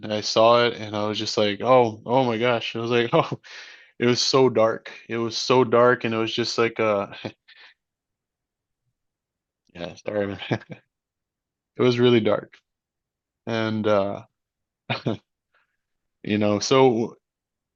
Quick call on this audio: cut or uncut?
uncut